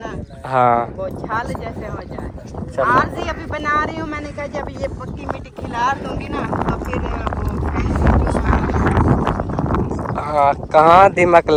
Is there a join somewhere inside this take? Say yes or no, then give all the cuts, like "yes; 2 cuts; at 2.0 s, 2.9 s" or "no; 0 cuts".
no; 0 cuts